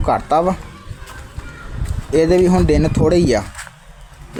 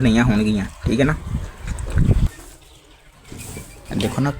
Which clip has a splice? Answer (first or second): second